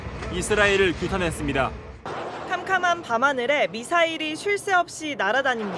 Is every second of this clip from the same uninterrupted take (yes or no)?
no